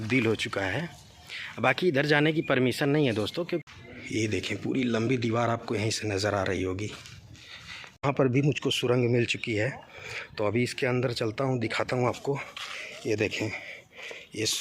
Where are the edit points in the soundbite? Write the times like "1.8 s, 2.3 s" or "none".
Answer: 3.6 s, 8.0 s